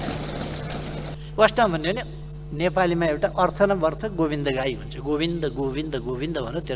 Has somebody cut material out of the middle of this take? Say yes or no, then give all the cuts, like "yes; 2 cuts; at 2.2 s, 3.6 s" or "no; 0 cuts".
yes; 1 cut; at 1.1 s